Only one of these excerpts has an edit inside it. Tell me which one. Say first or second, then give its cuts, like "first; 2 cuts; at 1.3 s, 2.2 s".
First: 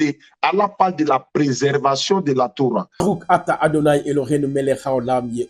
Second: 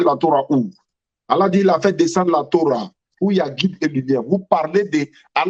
first; 1 cut; at 2.9 s